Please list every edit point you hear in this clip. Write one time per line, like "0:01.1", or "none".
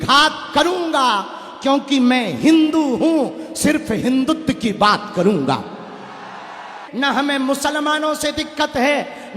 0:06.7